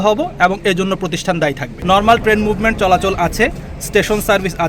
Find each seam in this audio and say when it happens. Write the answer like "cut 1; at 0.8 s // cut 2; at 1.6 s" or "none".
cut 1; at 1.7 s